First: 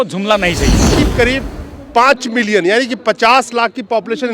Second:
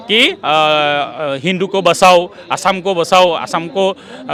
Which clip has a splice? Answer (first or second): first